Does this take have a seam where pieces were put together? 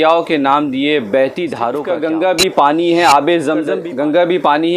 yes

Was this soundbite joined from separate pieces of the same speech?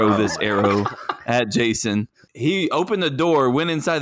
yes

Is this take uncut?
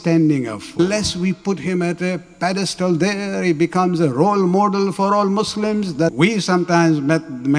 no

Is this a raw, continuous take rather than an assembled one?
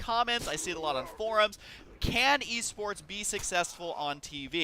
no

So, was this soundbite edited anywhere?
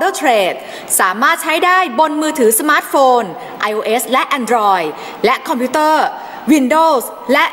no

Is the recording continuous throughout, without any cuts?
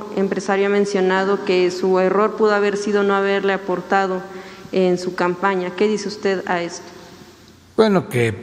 yes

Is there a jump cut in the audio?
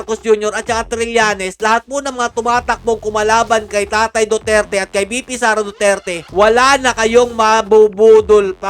no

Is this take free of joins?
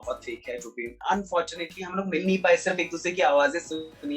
no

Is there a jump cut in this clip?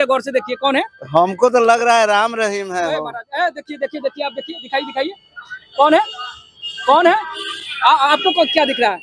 no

